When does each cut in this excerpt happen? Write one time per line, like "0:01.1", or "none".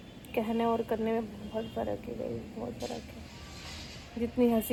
none